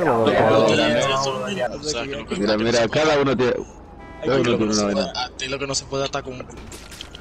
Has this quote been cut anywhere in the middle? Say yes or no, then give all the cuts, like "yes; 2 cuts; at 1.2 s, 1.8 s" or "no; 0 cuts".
yes; 1 cut; at 1.7 s